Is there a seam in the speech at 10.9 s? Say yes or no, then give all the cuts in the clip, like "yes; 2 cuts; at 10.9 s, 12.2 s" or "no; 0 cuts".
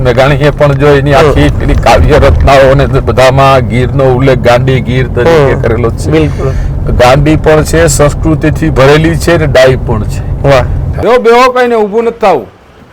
yes; 1 cut; at 10.9 s